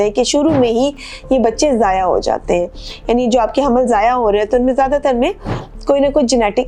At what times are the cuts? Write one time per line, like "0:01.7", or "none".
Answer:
none